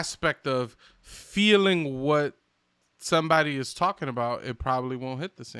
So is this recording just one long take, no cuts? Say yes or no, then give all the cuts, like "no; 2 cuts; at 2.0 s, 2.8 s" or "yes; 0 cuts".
yes; 0 cuts